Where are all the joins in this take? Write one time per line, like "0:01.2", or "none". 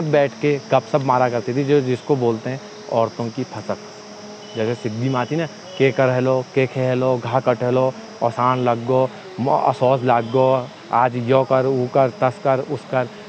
none